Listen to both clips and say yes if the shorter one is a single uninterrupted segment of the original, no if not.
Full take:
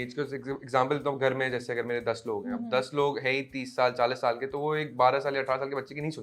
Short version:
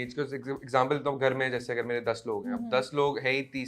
yes